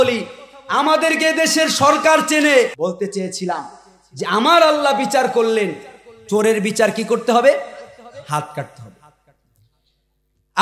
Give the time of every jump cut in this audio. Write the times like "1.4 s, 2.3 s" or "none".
2.7 s